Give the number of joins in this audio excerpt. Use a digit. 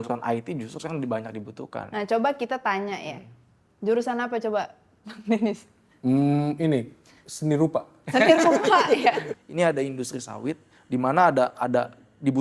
1